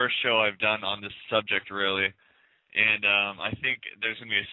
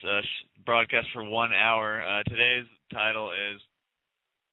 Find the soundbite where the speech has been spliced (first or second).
second